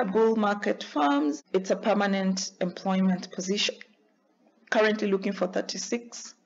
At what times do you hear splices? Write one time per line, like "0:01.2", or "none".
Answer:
0:01.4